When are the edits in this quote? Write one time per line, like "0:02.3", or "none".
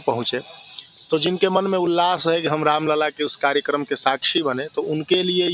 none